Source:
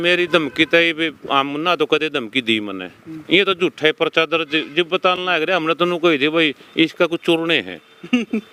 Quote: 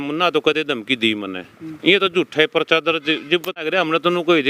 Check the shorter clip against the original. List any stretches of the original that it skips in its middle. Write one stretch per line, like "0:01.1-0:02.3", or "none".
0:04.9-0:05.2